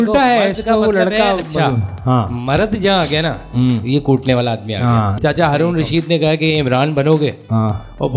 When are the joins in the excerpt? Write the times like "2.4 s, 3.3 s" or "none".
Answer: 5.2 s